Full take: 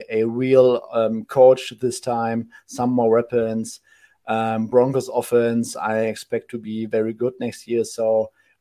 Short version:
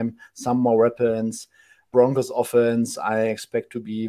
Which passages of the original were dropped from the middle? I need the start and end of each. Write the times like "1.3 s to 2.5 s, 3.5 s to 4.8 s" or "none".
4.2 s to 4.6 s